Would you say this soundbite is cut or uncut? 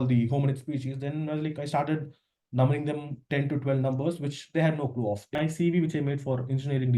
cut